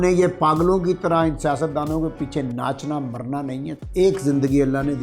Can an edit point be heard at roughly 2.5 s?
no; 1 cut; at 3.8 s

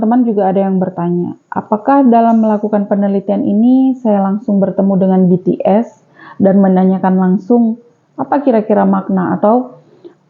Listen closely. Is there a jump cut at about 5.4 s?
no; 0 cuts

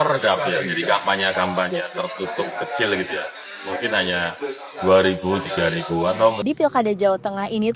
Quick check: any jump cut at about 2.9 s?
no; 1 cut; at 6.4 s

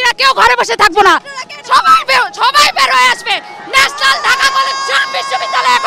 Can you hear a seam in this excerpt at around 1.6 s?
no; 0 cuts

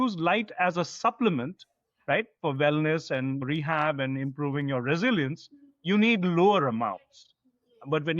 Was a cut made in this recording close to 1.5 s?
no; 1 cut; at 3.4 s

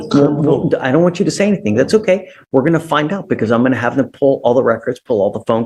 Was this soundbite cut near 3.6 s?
no; 0 cuts

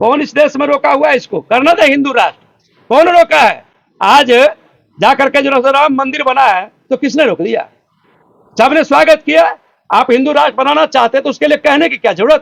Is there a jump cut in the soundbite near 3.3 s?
no; 0 cuts

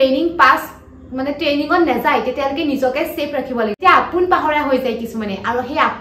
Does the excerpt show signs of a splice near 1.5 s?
no; 1 cut; at 3.8 s

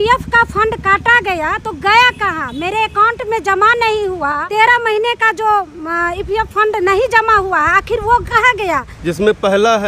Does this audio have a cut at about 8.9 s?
yes; 2 cuts; at 4.4 s, 8.9 s

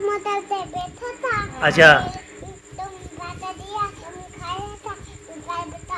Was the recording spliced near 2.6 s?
no; 1 cut; at 4.0 s

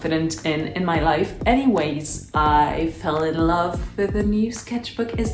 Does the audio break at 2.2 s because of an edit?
yes; 1 cut; at 2.2 s

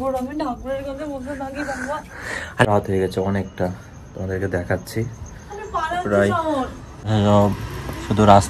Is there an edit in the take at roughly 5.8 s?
no; 2 cuts; at 2.7 s, 7.1 s

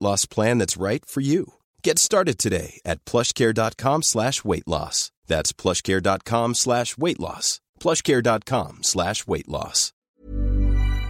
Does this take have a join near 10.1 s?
yes; 1 cut; at 10.1 s

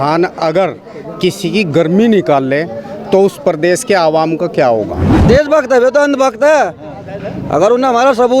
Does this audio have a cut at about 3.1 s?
no; 1 cut; at 5.1 s

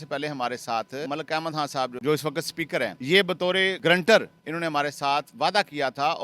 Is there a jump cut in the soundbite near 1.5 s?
yes; 3 cuts; at 1.5 s, 3.0 s, 3.8 s

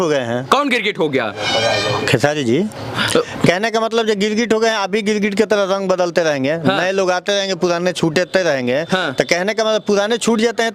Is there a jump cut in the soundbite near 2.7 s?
no; 0 cuts

